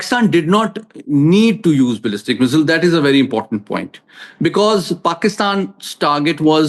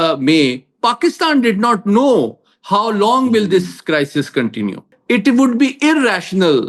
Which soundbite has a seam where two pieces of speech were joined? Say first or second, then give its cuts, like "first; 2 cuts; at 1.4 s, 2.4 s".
second; 1 cut; at 4.9 s